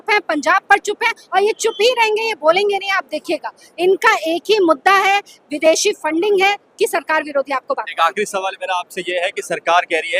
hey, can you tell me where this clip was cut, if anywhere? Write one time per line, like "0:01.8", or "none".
none